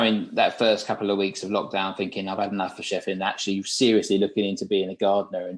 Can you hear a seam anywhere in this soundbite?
no; 0 cuts

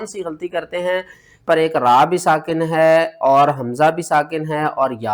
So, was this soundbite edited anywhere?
yes; 1 cut; at 1.5 s

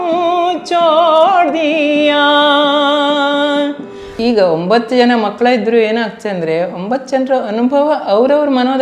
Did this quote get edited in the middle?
yes; 1 cut; at 4.2 s

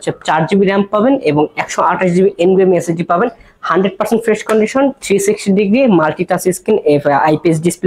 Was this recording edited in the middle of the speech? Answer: no; 0 cuts

